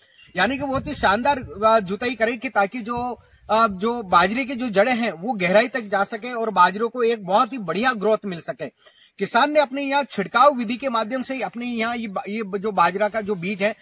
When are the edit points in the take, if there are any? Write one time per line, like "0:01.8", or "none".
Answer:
none